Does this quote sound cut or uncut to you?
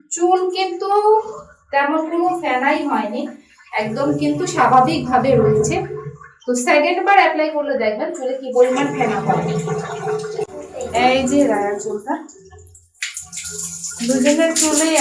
cut